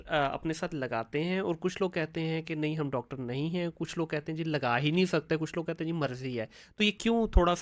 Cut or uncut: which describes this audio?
uncut